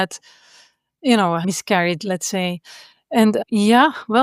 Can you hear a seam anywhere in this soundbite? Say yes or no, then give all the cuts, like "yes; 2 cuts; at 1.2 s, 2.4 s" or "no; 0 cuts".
no; 0 cuts